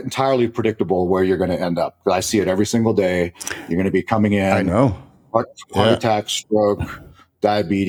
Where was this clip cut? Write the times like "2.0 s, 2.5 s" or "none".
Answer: none